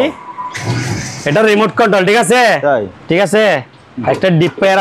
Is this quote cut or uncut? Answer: cut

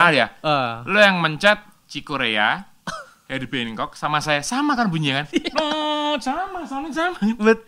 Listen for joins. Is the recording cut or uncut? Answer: uncut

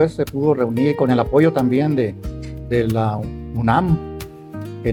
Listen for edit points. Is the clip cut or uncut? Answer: uncut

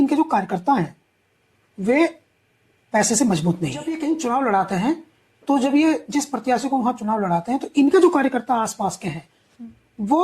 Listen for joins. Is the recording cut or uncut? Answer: cut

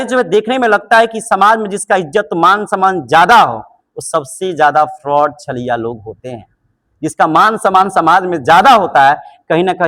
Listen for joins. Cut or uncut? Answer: uncut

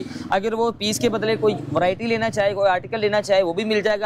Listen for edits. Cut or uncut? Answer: uncut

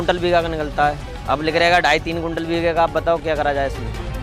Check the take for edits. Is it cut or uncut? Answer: uncut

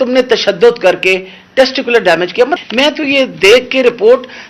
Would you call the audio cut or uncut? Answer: cut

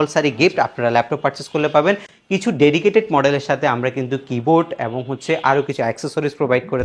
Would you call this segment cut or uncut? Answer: uncut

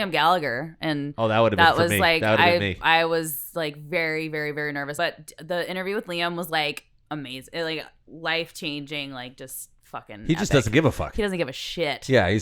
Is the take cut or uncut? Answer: cut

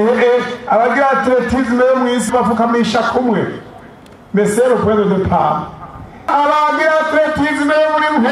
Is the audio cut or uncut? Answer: cut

